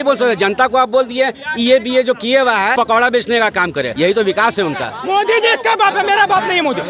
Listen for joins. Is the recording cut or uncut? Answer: cut